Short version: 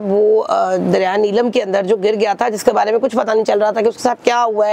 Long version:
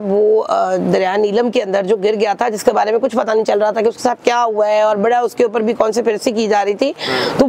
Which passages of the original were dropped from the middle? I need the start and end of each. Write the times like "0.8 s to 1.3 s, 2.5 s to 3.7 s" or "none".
none